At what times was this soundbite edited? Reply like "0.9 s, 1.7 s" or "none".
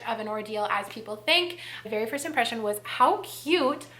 1.9 s